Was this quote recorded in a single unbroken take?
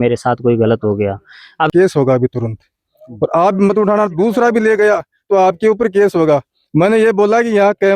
no; 1 cut; at 1.7 s

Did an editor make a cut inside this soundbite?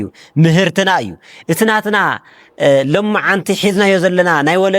no; 0 cuts

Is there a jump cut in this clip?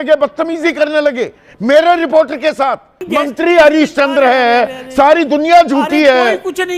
yes; 1 cut; at 3.0 s

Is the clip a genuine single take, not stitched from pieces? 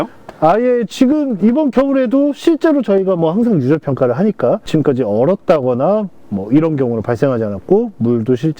no; 1 cut; at 4.6 s

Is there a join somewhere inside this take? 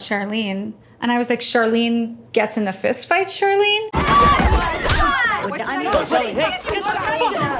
no; 0 cuts

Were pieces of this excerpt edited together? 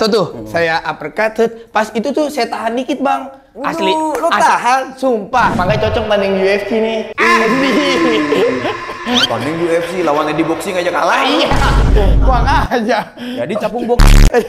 yes; 1 cut; at 5.5 s

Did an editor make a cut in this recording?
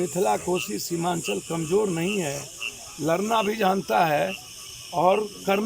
no; 0 cuts

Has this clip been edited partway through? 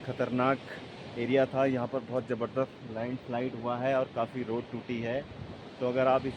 no; 0 cuts

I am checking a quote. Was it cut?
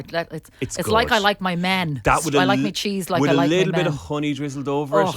no; 0 cuts

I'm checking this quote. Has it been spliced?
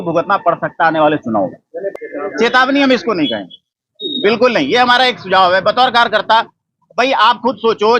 yes; 1 cut; at 1.9 s

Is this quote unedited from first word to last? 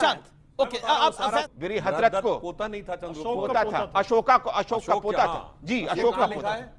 no; 1 cut; at 1.5 s

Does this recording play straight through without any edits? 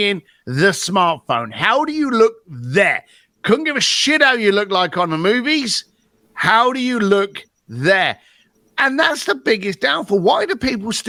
yes; 0 cuts

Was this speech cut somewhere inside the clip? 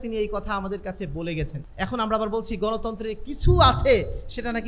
yes; 1 cut; at 1.6 s

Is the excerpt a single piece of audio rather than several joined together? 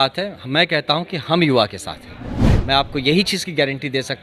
no; 1 cut; at 2.5 s

